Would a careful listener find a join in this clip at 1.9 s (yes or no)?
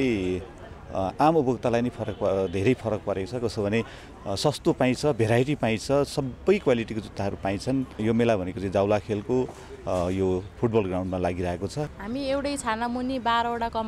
no